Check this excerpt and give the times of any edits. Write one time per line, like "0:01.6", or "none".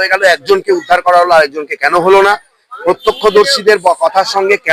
none